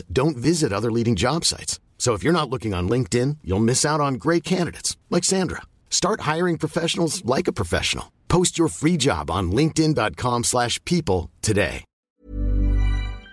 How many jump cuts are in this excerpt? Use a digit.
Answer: 1